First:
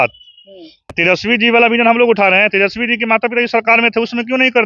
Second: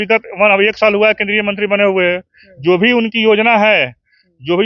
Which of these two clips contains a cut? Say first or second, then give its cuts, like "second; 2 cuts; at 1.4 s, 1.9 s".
first; 1 cut; at 0.9 s